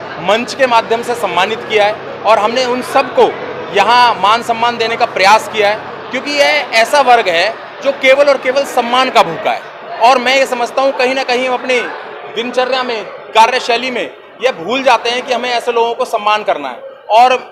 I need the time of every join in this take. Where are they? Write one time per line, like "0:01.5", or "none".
none